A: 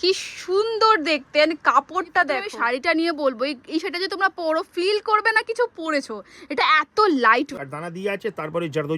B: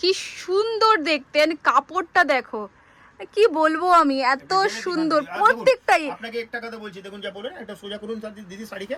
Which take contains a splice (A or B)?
A